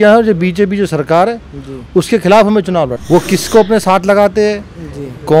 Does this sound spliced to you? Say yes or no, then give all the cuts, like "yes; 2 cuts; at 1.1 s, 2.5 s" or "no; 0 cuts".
yes; 1 cut; at 3.0 s